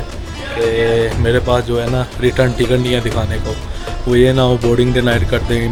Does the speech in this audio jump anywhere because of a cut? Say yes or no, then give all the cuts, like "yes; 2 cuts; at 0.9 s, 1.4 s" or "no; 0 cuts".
no; 0 cuts